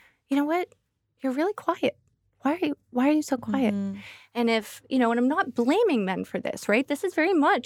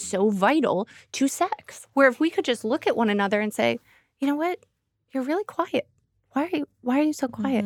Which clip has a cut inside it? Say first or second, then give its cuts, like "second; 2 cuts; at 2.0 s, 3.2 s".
second; 1 cut; at 1.7 s